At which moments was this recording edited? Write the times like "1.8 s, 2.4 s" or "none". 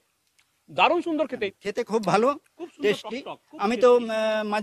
1.5 s